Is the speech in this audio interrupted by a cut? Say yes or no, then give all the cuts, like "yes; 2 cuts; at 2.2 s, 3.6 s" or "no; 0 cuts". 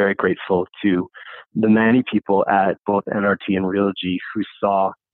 no; 0 cuts